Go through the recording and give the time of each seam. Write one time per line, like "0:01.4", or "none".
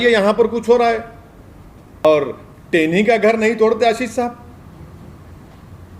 0:02.0